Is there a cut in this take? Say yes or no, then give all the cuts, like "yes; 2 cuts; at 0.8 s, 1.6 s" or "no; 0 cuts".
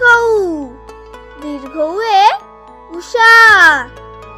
no; 0 cuts